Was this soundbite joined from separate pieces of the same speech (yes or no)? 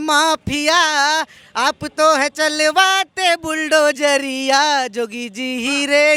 no